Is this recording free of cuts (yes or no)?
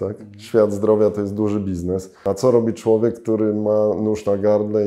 no